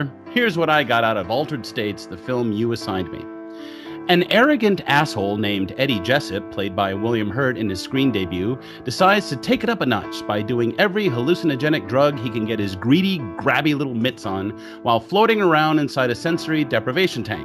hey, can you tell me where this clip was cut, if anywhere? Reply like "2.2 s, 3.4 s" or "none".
10.1 s